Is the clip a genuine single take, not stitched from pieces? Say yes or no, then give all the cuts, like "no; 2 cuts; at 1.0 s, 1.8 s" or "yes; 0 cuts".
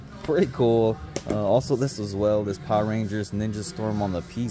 yes; 0 cuts